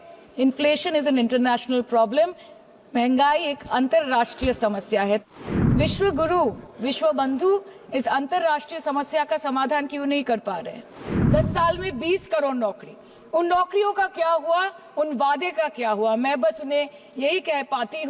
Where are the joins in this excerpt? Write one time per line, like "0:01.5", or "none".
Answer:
0:05.3
0:11.1